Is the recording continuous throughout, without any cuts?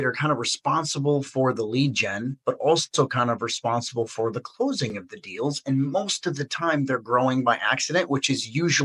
yes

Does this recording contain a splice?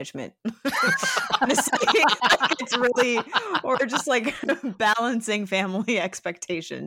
no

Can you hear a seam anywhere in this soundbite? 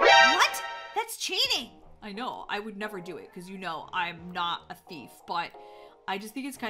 no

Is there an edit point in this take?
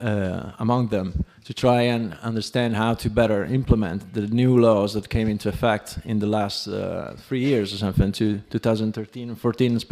yes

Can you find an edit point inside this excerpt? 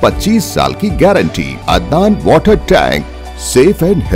yes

